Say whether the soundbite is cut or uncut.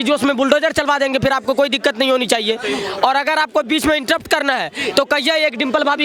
uncut